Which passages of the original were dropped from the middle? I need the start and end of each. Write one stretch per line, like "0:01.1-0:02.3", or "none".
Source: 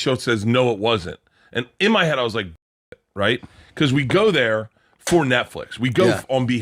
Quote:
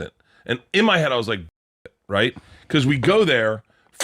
none